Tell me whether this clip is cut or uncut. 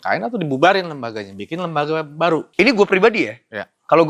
cut